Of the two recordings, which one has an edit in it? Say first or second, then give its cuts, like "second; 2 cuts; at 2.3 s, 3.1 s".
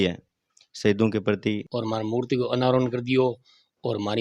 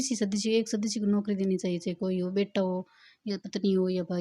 first; 1 cut; at 1.7 s